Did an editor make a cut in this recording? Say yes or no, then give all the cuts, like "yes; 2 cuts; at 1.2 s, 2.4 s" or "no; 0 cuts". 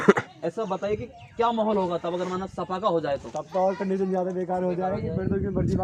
no; 0 cuts